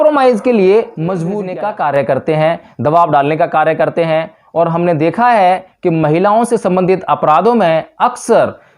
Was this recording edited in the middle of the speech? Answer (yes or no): yes